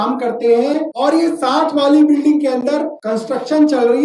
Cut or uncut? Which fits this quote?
cut